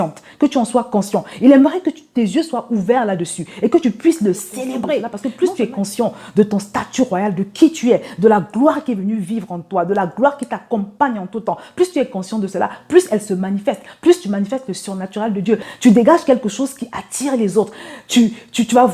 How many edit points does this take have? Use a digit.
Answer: 2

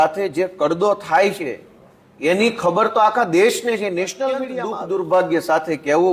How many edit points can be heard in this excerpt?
1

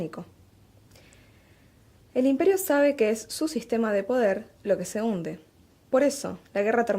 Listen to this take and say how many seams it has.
1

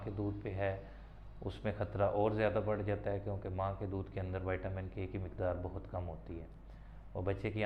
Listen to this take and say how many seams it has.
0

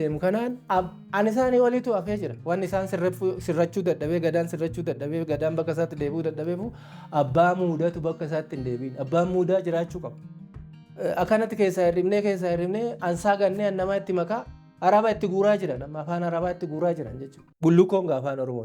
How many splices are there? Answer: 1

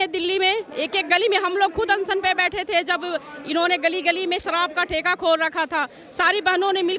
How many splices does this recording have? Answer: 0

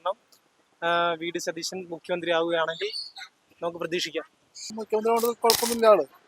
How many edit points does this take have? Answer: 1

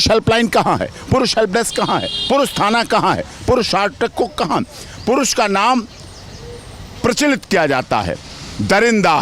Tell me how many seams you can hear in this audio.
0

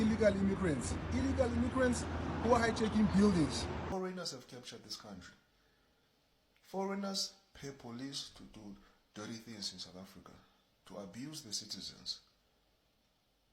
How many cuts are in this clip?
1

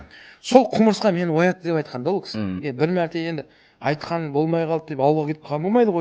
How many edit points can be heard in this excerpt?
1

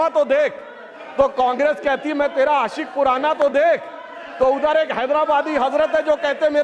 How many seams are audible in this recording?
0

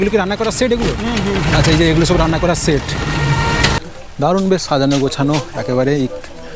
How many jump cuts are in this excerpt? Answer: 1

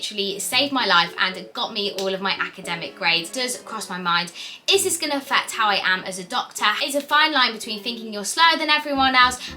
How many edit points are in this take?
2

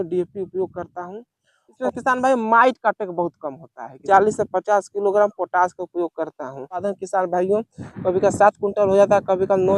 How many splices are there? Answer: 3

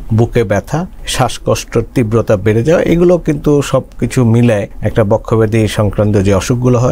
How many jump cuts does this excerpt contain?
2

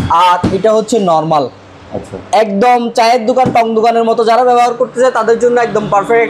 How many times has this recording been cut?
0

